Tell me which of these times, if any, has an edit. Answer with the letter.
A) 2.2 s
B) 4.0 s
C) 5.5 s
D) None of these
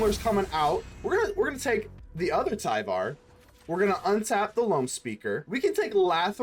C